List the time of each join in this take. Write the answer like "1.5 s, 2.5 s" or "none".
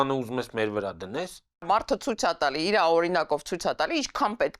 1.7 s